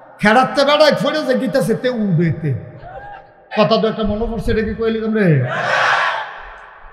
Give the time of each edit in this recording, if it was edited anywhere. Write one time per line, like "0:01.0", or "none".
0:03.5